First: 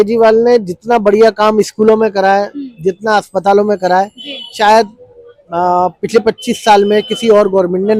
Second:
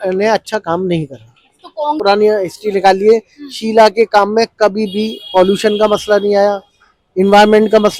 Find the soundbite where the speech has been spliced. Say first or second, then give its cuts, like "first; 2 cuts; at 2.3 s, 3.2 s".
second; 1 cut; at 2.0 s